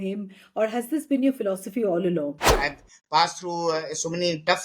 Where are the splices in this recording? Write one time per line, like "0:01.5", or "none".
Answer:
0:02.5